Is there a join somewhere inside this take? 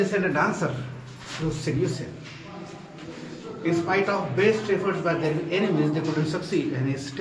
no; 0 cuts

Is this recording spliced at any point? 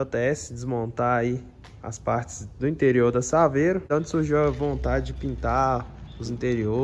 yes; 1 cut; at 3.9 s

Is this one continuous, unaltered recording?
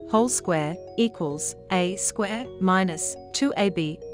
yes; 0 cuts

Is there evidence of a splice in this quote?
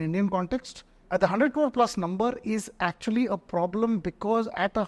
yes; 1 cut; at 0.9 s

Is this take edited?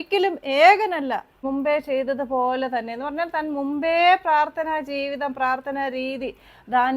yes; 1 cut; at 1.4 s

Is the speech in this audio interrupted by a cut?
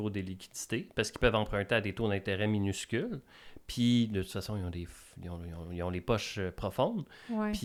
no; 0 cuts

